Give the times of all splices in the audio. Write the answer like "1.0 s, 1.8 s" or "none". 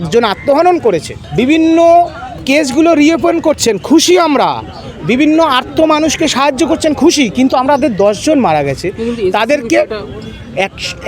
1.2 s